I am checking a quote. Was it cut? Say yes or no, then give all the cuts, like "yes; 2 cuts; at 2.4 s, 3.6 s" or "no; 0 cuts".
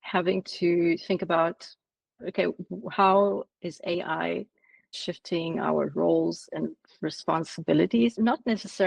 yes; 1 cut; at 5.0 s